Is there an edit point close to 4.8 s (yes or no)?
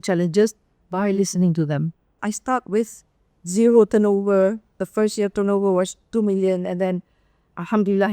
no